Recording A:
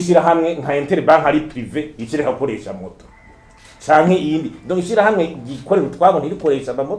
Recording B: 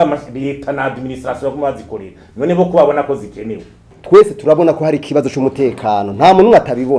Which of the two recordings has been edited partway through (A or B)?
B